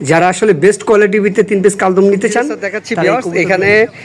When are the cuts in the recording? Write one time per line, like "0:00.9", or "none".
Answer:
0:03.0

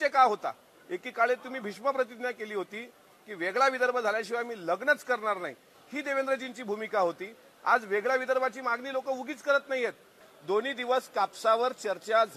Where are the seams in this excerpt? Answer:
0:10.3

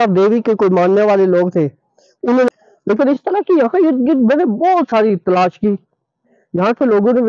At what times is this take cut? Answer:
0:02.5

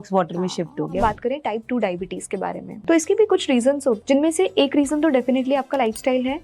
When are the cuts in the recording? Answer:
0:01.0
0:02.8
0:04.0

